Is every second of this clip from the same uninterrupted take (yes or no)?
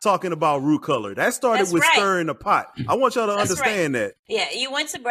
no